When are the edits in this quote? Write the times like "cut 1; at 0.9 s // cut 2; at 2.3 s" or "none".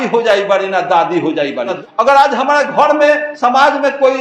cut 1; at 1.7 s // cut 2; at 3.3 s